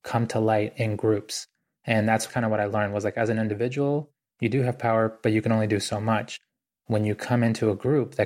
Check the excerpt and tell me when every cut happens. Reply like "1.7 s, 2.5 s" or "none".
2.3 s